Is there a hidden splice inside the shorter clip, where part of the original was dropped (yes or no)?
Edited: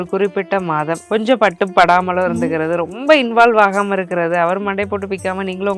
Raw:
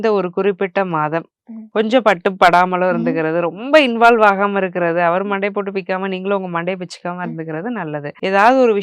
yes